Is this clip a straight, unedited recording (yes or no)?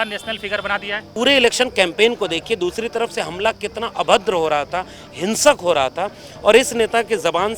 no